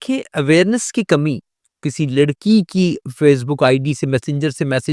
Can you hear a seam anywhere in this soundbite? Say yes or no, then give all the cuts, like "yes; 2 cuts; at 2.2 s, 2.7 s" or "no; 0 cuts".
yes; 1 cut; at 1.4 s